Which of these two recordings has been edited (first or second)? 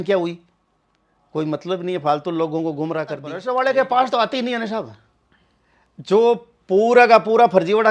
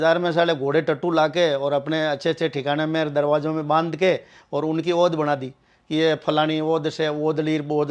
first